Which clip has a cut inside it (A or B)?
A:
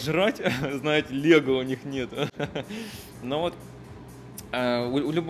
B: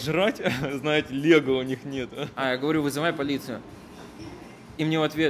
B